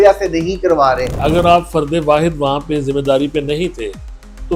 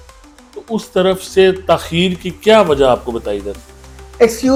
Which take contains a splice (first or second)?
first